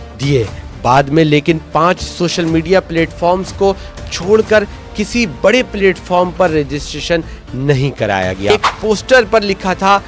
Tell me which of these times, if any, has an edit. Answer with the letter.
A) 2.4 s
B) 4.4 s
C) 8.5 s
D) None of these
C